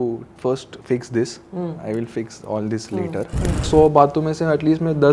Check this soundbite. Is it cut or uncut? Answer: cut